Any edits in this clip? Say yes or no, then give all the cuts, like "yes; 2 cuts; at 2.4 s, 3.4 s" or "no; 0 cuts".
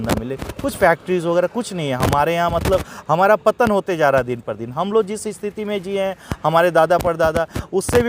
no; 0 cuts